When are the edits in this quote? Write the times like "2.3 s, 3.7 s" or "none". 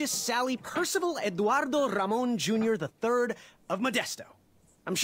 3.5 s